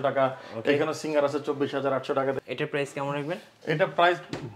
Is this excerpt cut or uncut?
cut